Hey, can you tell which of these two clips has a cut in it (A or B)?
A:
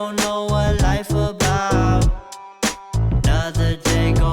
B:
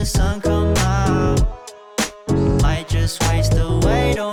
A